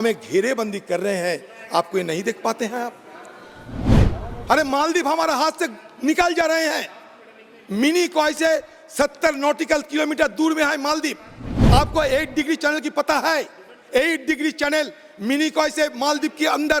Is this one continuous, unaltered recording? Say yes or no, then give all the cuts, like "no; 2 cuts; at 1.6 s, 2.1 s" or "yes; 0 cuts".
yes; 0 cuts